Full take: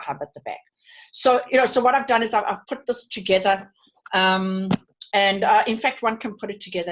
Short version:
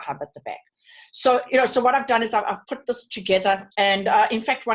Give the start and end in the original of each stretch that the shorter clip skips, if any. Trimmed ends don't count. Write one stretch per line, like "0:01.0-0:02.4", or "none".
0:03.7-0:05.0